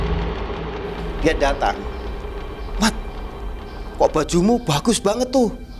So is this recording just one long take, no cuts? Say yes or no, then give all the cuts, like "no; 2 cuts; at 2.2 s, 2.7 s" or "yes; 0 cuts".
no; 1 cut; at 1.0 s